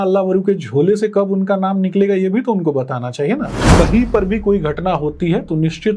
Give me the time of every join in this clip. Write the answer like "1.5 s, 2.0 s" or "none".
3.6 s